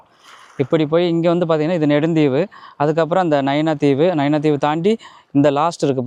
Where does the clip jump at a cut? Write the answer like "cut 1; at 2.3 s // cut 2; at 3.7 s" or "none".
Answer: none